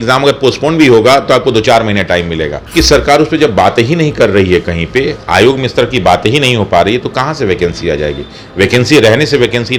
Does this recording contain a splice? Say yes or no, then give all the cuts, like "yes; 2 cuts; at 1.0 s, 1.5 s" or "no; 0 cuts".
yes; 1 cut; at 2.6 s